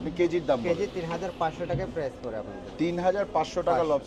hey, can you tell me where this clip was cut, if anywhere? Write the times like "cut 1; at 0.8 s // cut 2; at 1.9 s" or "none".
none